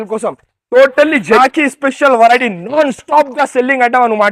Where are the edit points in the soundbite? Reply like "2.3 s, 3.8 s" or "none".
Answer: 1.4 s